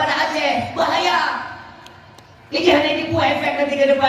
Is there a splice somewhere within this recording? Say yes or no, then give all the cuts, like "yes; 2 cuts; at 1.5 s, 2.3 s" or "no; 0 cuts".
no; 0 cuts